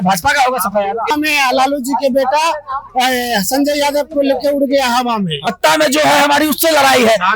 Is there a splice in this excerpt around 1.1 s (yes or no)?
yes